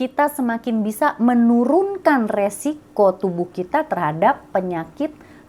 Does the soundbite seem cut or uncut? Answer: uncut